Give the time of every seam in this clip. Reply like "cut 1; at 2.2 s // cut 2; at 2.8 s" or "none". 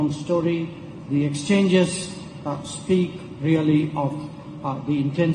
none